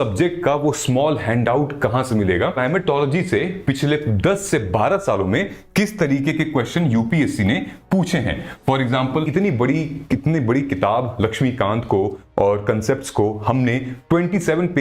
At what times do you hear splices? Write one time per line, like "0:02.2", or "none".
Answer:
0:02.6
0:09.3